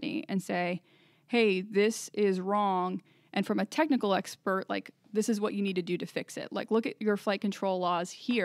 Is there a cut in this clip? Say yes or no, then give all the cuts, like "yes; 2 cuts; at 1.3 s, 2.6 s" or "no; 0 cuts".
no; 0 cuts